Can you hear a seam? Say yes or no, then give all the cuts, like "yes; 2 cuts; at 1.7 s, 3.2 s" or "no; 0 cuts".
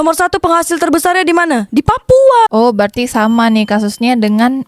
yes; 1 cut; at 2.5 s